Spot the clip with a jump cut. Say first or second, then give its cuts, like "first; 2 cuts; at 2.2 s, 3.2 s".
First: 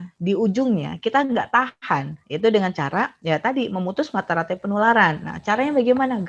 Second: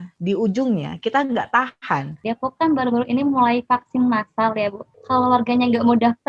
second; 2 cuts; at 2.2 s, 4.9 s